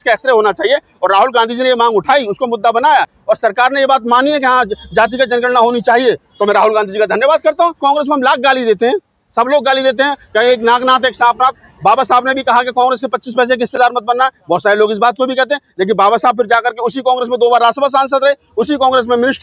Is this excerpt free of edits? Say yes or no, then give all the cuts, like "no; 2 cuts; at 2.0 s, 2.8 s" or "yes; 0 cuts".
no; 1 cut; at 7.8 s